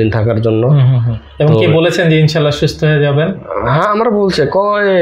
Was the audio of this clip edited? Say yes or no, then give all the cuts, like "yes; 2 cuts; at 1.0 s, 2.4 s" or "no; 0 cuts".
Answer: no; 0 cuts